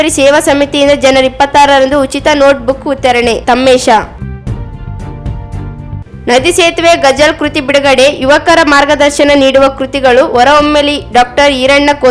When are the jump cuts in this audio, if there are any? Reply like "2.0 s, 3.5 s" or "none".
none